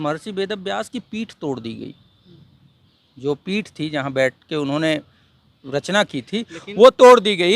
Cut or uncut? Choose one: uncut